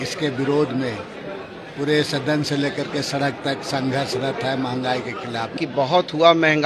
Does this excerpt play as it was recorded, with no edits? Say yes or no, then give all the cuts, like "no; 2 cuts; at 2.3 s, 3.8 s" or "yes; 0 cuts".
no; 1 cut; at 5.6 s